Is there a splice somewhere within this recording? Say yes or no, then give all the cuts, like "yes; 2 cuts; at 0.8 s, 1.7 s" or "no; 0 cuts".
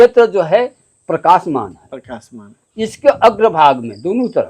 no; 0 cuts